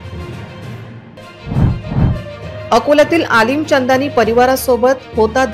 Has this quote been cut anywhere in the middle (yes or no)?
yes